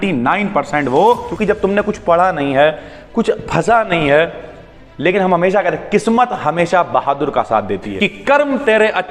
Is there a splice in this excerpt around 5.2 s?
no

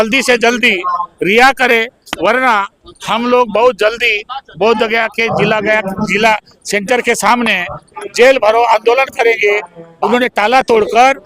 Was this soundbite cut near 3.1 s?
no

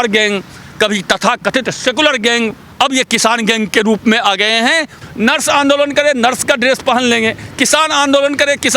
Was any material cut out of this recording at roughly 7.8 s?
no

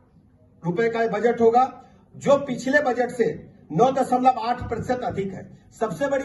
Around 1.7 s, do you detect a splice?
no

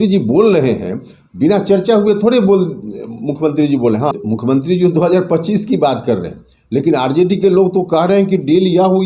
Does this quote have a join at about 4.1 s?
yes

